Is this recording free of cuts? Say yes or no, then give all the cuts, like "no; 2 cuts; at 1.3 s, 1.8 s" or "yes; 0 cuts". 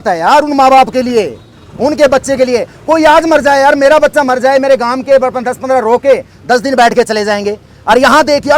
yes; 0 cuts